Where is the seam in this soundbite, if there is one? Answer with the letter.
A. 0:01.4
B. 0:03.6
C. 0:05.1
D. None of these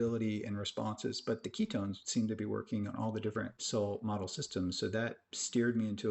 B